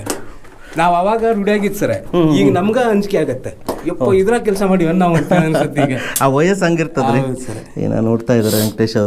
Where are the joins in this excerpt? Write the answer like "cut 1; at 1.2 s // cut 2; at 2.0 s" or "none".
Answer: none